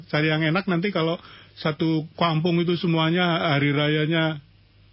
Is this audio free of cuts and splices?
yes; 0 cuts

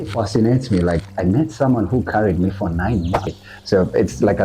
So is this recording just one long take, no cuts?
no; 1 cut; at 3.5 s

